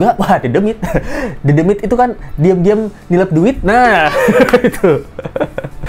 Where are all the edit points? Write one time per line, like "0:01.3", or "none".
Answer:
none